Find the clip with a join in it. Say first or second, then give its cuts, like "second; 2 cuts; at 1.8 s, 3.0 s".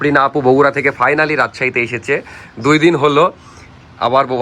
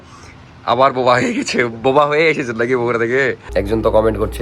second; 1 cut; at 3.4 s